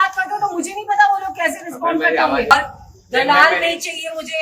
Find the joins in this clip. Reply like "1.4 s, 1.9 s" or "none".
2.5 s

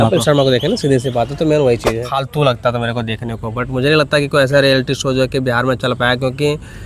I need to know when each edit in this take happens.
2.2 s

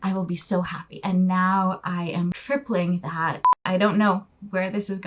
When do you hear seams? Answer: 1.0 s, 2.3 s, 3.5 s

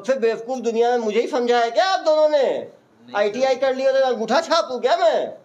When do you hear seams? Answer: none

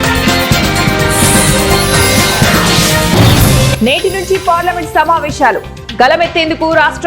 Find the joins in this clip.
3.7 s

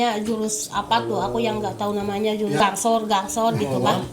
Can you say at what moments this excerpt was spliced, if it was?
2.6 s

